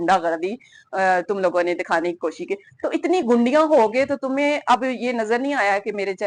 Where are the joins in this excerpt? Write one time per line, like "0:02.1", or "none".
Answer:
none